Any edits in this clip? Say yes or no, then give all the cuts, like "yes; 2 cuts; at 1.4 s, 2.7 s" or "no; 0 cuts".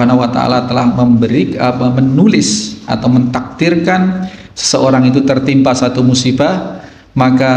no; 0 cuts